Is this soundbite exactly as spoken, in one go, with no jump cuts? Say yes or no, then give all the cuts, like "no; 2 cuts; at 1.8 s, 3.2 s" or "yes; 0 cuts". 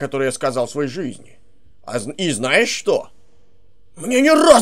yes; 0 cuts